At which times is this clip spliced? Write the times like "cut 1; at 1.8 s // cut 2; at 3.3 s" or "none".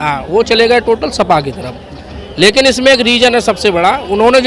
none